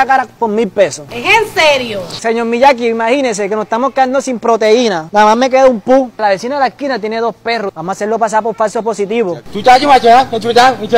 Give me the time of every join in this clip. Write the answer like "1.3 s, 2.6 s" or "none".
1.0 s, 2.1 s, 9.4 s